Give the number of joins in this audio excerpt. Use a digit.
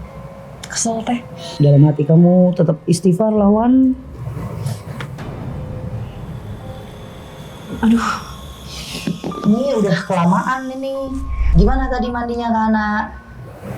2